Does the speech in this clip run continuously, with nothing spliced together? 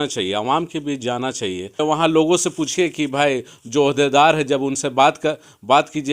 no; 1 cut; at 1.8 s

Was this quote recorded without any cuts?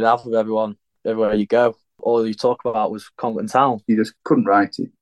no; 1 cut; at 4.1 s

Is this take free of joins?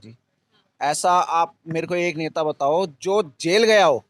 yes; 0 cuts

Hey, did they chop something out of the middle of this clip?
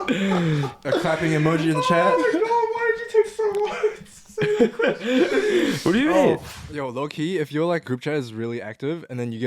yes; 2 cuts; at 6.5 s, 7.8 s

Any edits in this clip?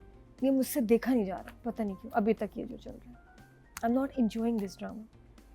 no; 0 cuts

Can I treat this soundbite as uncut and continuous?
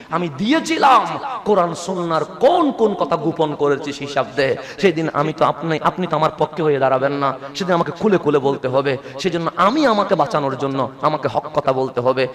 yes; 0 cuts

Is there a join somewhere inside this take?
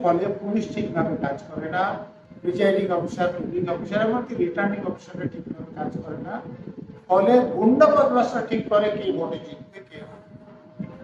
no; 0 cuts

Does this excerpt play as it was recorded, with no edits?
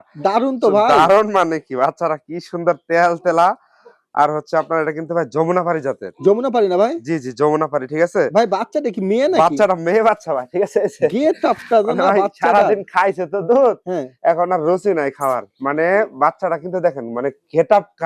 yes; 0 cuts

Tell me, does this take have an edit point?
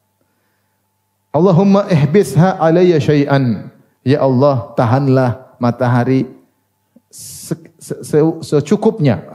no; 0 cuts

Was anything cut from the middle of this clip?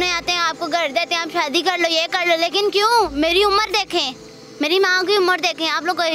no; 0 cuts

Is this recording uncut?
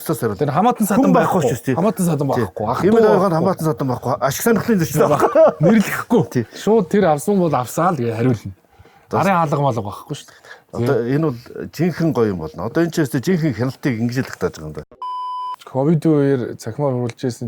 no; 1 cut; at 15.0 s

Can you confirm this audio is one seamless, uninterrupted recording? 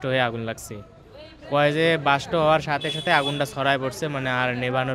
yes; 0 cuts

